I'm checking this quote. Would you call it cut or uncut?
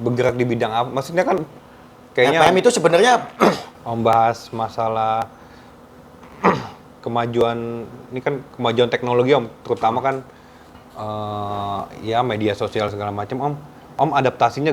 cut